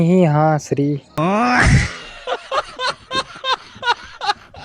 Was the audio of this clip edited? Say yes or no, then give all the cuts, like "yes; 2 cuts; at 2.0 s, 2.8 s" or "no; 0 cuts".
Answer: yes; 1 cut; at 1.2 s